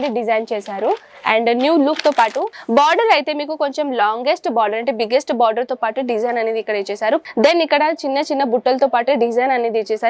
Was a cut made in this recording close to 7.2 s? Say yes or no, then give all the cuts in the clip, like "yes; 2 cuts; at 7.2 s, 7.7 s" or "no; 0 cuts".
yes; 2 cuts; at 2.5 s, 7.2 s